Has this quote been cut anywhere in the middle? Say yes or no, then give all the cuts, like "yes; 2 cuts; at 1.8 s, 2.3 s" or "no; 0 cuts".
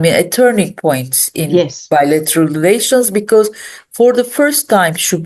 no; 0 cuts